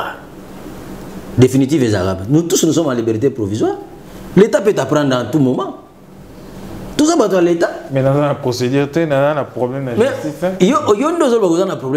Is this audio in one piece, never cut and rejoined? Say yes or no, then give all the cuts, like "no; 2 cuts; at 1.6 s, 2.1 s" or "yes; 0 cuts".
yes; 0 cuts